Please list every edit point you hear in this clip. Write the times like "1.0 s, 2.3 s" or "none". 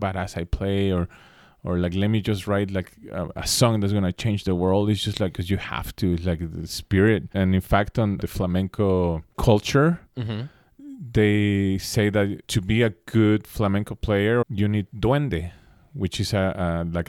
5.4 s, 7.3 s, 8.2 s, 9.4 s, 12.5 s, 14.4 s